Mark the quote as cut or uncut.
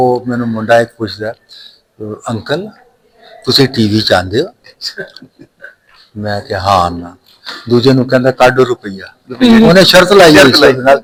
uncut